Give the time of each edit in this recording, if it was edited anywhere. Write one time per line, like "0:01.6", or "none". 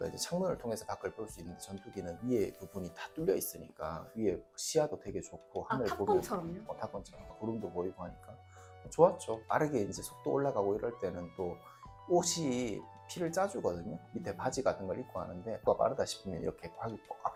none